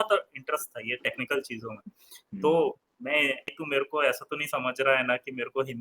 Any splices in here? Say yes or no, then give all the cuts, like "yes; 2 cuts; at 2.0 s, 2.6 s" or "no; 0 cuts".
yes; 1 cut; at 3.6 s